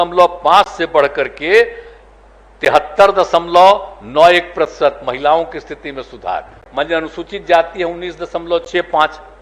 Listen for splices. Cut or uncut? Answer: cut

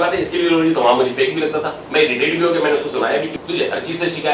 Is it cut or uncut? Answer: cut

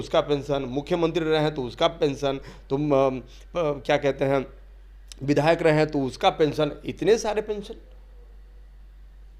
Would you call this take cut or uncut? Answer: uncut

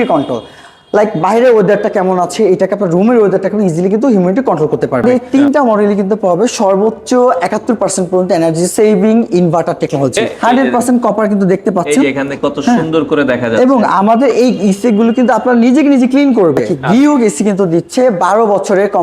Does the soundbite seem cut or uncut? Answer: cut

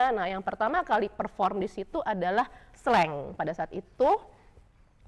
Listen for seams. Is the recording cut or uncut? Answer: cut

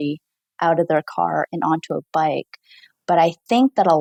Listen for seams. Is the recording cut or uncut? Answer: uncut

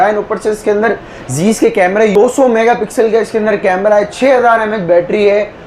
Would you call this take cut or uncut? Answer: cut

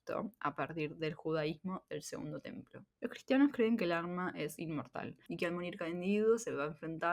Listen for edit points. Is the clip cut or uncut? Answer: cut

